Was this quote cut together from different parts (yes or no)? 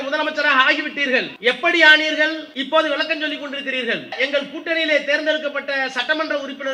yes